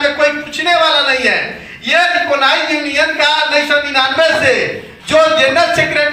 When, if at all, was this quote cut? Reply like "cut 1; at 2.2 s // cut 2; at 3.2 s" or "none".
none